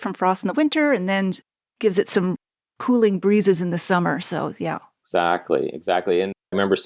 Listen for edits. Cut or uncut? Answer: uncut